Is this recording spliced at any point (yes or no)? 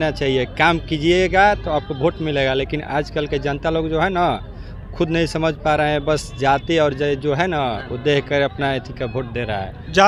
no